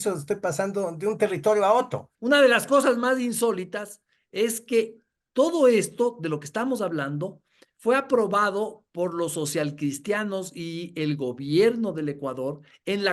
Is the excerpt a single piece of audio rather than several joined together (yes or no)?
no